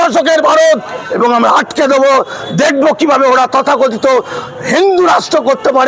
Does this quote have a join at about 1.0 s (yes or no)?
yes